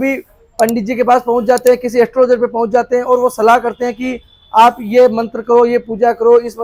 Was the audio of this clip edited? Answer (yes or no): no